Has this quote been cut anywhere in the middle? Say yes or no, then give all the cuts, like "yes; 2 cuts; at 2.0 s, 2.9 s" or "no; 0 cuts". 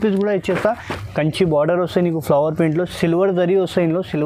yes; 1 cut; at 0.9 s